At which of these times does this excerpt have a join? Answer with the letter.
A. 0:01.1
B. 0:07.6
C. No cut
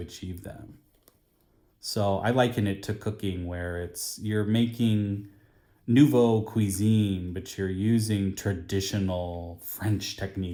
C